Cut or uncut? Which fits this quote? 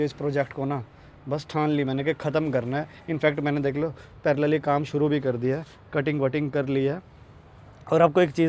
uncut